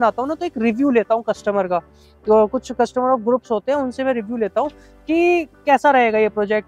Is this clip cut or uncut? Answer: uncut